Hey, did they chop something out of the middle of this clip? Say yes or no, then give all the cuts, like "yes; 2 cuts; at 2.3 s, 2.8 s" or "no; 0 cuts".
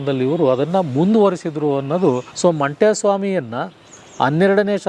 yes; 1 cut; at 2.3 s